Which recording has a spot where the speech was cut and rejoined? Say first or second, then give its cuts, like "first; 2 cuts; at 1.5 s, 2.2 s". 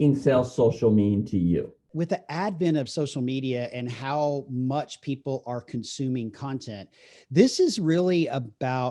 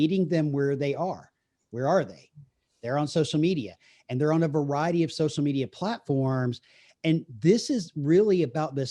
first; 1 cut; at 1.8 s